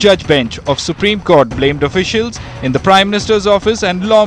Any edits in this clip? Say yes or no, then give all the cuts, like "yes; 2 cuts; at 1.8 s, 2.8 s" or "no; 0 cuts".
yes; 1 cut; at 2.1 s